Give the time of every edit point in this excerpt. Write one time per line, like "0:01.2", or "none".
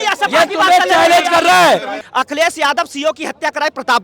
0:02.0